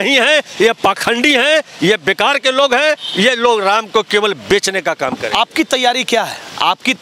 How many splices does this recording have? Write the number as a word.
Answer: zero